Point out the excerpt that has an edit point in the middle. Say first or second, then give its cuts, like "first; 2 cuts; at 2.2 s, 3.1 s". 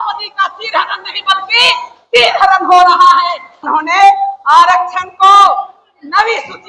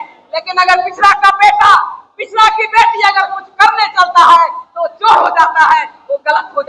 first; 1 cut; at 3.6 s